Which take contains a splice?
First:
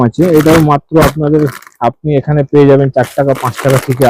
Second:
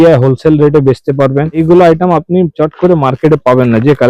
second; 1 cut; at 1.6 s

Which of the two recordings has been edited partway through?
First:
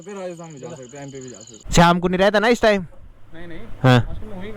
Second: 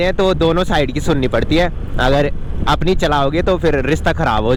first; 1 cut; at 1.4 s

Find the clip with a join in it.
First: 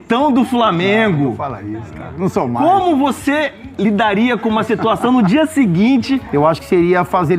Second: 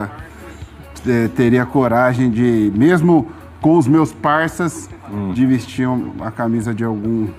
first; 1 cut; at 6.3 s

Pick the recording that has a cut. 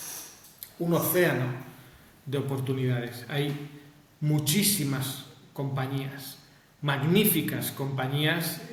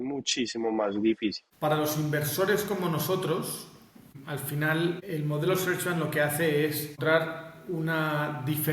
second; 4 cuts; at 1.5 s, 4.1 s, 5.0 s, 7.0 s

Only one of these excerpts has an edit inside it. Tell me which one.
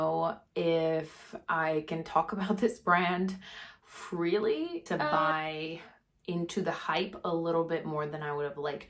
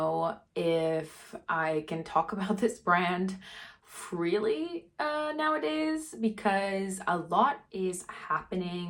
first; 1 cut; at 4.9 s

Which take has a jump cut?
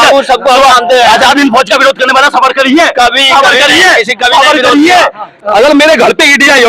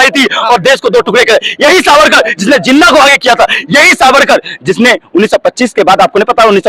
first; 1 cut; at 5.4 s

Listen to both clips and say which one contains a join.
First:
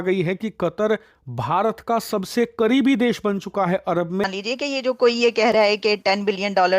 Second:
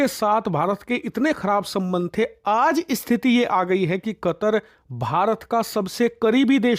first; 1 cut; at 4.2 s

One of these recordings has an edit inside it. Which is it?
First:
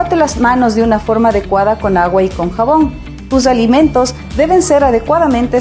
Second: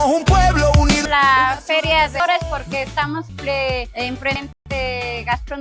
second; 4 cuts; at 1.1 s, 2.2 s, 3.3 s, 4.5 s

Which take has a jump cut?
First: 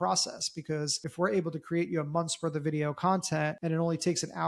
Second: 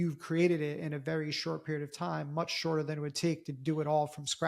first; 2 cuts; at 1.0 s, 3.6 s

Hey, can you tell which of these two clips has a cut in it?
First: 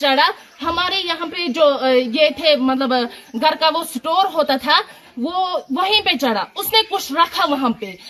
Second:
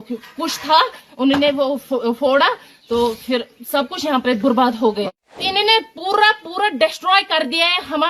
second; 1 cut; at 5.0 s

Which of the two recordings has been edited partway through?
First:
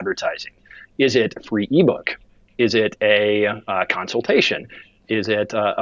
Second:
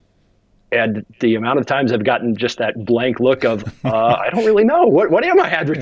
first; 2 cuts; at 1.3 s, 5.0 s

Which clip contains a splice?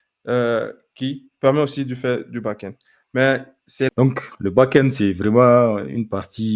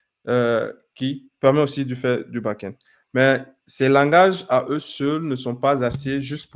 first; 1 cut; at 3.9 s

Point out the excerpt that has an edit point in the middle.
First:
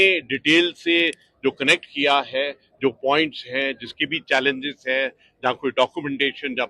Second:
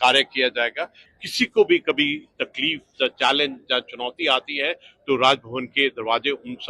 second; 1 cut; at 1.0 s

